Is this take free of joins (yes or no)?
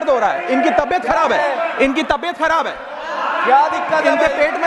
yes